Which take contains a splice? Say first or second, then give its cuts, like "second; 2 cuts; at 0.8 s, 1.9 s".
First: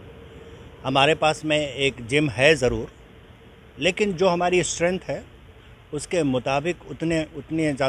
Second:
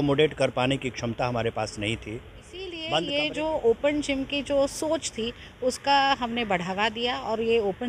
second; 1 cut; at 2.9 s